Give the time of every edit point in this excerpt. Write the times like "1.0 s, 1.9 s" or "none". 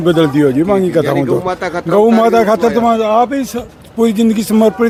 none